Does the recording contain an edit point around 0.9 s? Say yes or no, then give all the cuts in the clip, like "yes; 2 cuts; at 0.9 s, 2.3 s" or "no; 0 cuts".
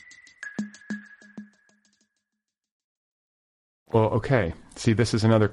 no; 0 cuts